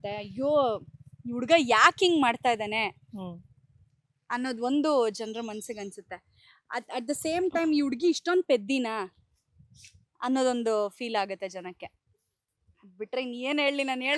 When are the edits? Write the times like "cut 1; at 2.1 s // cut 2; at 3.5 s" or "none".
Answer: none